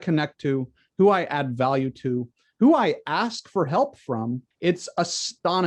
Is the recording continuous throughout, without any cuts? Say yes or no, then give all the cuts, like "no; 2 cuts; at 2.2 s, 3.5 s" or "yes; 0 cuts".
yes; 0 cuts